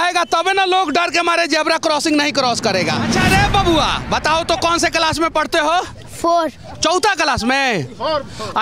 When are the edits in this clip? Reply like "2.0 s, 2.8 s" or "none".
3.1 s